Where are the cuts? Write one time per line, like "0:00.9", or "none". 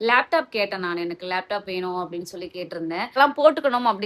0:03.2